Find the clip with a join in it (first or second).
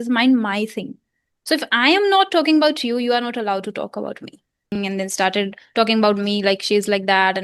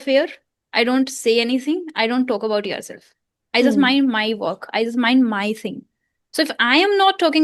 first